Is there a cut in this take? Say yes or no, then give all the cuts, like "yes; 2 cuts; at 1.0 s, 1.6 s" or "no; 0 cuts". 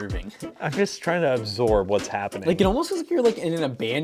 no; 0 cuts